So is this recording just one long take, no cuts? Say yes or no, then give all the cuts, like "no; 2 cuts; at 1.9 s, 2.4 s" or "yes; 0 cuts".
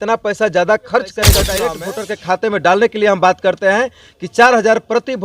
no; 1 cut; at 1.5 s